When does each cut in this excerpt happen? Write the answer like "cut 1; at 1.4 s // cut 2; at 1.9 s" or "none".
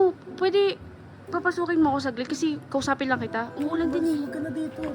cut 1; at 3.5 s